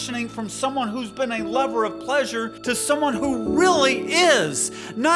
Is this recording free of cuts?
no; 1 cut; at 2.5 s

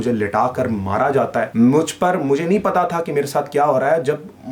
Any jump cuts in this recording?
yes; 1 cut; at 1.5 s

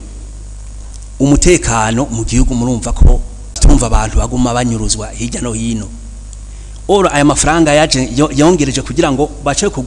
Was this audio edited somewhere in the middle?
yes; 1 cut; at 3.6 s

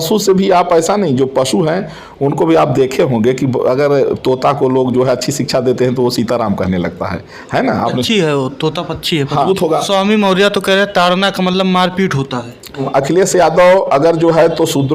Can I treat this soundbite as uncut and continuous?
no; 2 cuts; at 9.5 s, 12.8 s

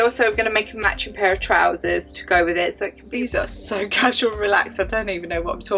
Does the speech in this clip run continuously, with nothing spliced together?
no; 1 cut; at 3.0 s

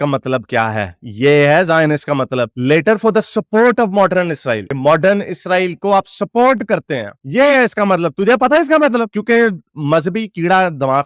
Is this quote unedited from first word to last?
yes; 0 cuts

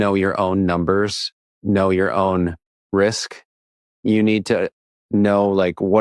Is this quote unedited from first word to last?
yes; 0 cuts

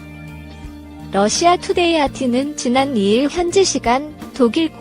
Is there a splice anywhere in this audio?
yes; 1 cut; at 1.1 s

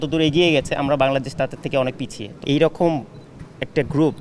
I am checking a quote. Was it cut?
yes; 1 cut; at 2.2 s

